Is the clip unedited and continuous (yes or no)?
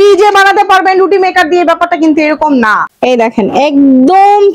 no